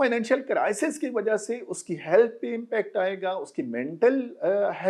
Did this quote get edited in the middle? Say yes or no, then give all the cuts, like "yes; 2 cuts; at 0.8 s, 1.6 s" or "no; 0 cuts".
no; 0 cuts